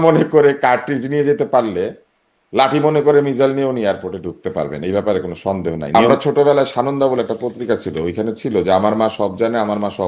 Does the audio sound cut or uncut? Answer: cut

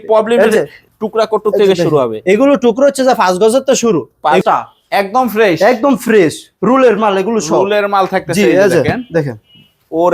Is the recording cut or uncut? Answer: cut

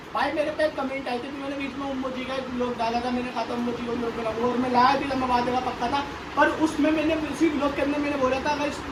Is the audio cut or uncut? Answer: uncut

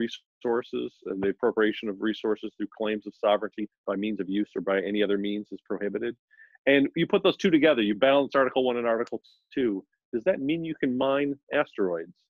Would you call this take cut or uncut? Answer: uncut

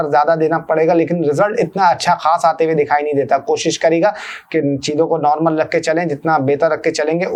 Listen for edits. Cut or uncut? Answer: uncut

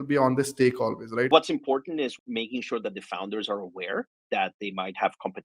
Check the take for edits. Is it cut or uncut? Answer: cut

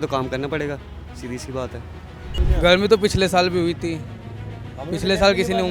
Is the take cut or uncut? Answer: cut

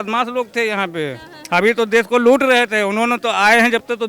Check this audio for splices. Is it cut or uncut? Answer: uncut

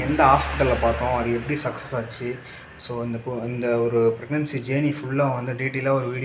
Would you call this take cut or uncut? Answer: uncut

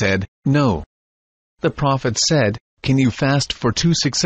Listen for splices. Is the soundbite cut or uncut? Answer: uncut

